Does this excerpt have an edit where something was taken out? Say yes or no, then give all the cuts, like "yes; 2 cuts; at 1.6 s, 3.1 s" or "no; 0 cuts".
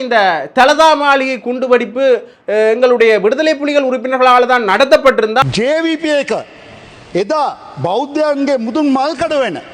yes; 1 cut; at 5.4 s